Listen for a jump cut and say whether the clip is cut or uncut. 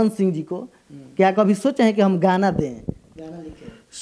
uncut